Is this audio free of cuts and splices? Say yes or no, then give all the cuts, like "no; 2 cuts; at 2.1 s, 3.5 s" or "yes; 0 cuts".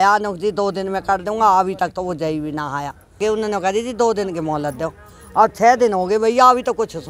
no; 1 cut; at 3.2 s